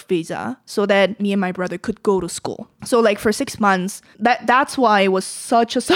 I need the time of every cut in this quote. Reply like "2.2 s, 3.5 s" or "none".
1.2 s, 2.7 s, 4.0 s